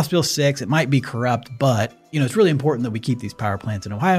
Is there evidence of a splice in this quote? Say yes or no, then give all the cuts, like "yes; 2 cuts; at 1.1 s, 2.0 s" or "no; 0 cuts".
yes; 1 cut; at 2.1 s